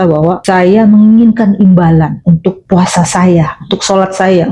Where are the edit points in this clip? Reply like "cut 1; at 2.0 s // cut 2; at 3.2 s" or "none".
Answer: none